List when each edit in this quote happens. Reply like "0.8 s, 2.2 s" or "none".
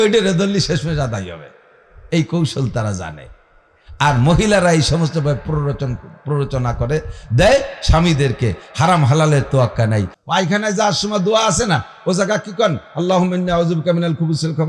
10.1 s